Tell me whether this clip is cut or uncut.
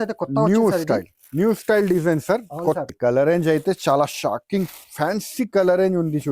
cut